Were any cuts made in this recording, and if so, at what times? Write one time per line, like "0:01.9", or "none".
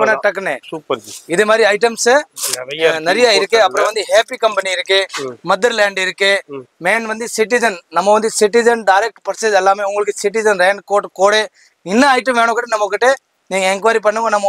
none